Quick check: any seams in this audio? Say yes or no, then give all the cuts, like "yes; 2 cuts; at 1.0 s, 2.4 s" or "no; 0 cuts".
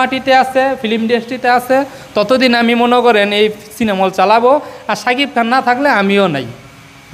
no; 0 cuts